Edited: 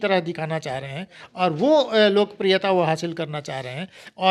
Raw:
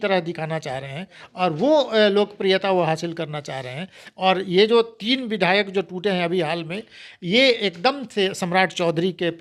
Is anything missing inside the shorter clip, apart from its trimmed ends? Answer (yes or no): no